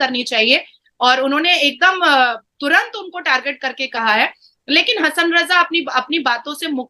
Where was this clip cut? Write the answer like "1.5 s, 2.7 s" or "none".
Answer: none